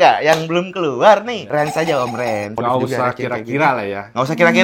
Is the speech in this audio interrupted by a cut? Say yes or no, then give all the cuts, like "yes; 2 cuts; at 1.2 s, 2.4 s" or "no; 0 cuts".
yes; 2 cuts; at 1.4 s, 2.5 s